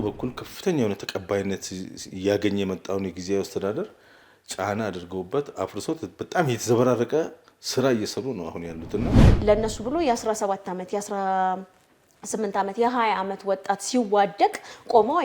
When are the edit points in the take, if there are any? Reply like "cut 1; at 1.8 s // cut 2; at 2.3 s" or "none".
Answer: cut 1; at 9.2 s